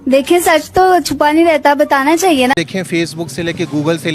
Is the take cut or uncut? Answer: cut